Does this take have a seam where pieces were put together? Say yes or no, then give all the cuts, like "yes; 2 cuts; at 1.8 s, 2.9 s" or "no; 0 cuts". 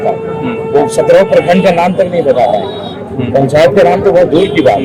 no; 0 cuts